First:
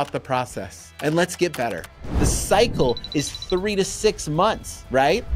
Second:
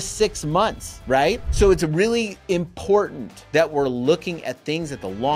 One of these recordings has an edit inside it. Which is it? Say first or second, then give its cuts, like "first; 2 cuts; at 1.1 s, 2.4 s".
first; 1 cut; at 2.1 s